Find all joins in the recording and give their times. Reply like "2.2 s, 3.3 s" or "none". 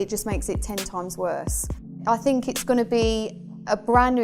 2.0 s